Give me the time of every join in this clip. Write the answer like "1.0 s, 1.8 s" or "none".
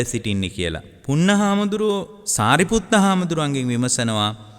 0.9 s, 2.2 s

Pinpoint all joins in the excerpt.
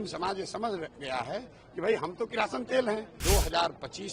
3.1 s

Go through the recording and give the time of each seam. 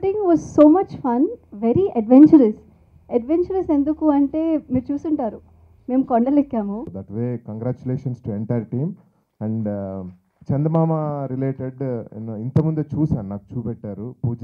7.0 s

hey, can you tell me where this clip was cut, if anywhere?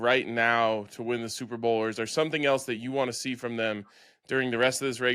none

